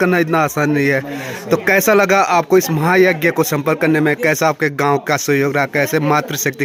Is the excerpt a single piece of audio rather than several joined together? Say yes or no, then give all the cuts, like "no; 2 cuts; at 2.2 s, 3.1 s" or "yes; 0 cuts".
yes; 0 cuts